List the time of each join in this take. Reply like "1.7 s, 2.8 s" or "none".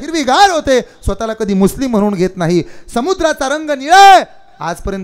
none

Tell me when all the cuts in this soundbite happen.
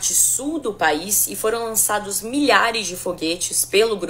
2.5 s

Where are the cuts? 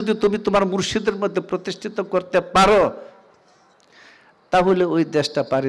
none

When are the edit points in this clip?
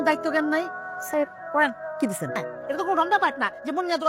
2.4 s

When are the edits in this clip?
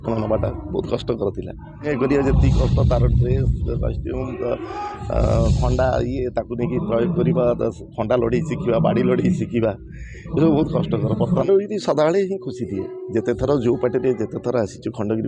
1.9 s, 11.4 s

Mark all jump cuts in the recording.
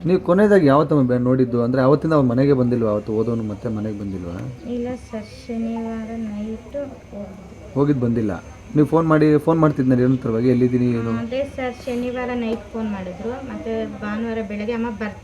7.0 s

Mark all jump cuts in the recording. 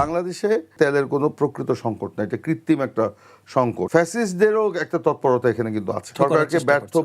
0.7 s, 3.9 s, 6.1 s

